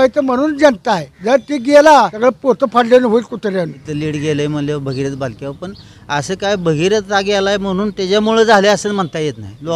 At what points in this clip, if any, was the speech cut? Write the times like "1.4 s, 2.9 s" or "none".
1.1 s, 2.1 s, 3.9 s